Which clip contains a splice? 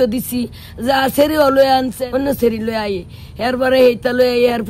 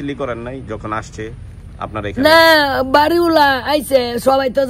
first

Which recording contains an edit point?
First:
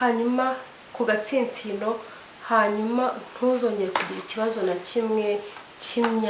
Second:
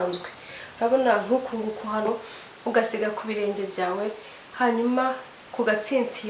second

